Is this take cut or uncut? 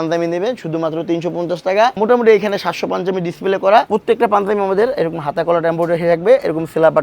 cut